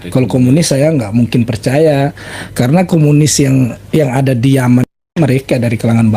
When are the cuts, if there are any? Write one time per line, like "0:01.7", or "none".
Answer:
none